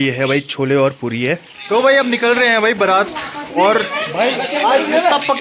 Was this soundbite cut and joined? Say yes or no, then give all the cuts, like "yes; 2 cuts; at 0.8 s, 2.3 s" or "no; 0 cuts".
yes; 1 cut; at 1.7 s